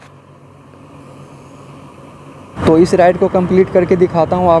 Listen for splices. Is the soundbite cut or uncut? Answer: cut